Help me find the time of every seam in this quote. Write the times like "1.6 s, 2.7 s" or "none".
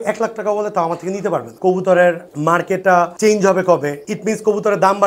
1.5 s